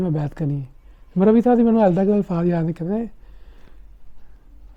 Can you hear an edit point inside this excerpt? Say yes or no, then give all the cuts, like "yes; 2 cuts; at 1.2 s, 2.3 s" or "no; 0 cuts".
no; 0 cuts